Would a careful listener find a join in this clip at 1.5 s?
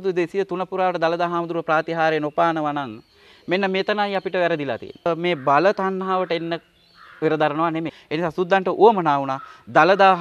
no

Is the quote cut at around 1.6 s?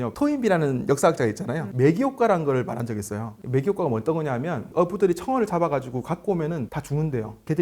yes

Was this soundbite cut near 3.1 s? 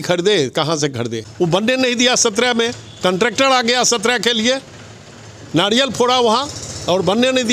no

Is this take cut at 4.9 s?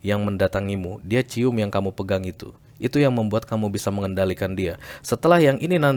no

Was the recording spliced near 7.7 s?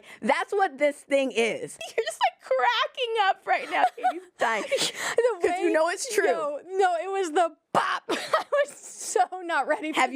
no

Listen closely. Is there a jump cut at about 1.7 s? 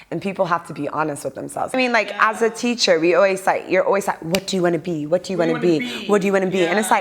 yes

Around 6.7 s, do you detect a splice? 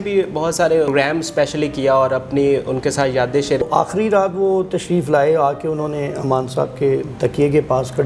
no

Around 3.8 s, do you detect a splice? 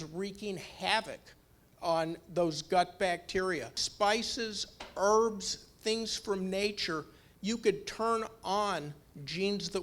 yes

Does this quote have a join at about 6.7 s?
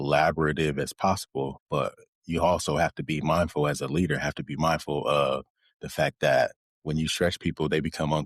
yes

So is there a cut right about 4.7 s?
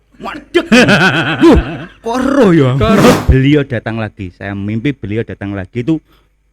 no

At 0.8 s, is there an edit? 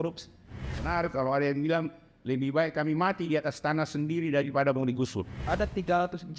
yes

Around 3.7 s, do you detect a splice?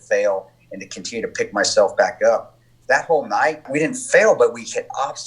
yes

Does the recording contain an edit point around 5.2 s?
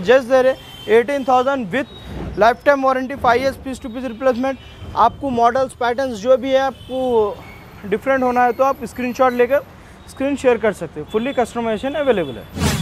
no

